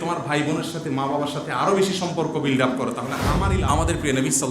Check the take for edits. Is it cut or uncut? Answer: cut